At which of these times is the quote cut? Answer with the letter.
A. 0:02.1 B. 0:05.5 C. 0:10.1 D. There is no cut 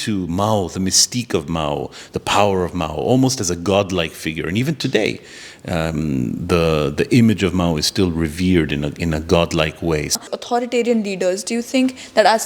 C